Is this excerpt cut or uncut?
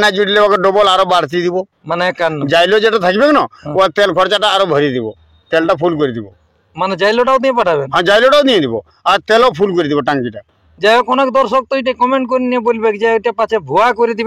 uncut